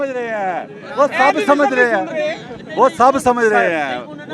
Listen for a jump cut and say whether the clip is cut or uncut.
uncut